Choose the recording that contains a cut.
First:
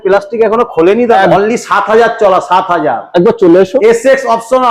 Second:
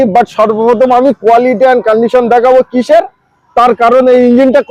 first; 1 cut; at 1.3 s

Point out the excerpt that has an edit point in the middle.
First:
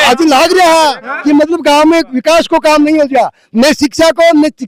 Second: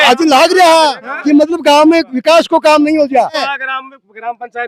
second; 1 cut; at 3.4 s

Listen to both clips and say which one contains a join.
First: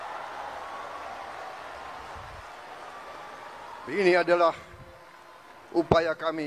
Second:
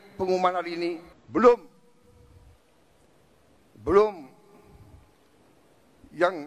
second; 1 cut; at 1.1 s

